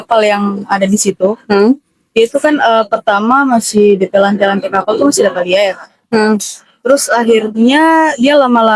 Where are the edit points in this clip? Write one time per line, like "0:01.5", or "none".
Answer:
none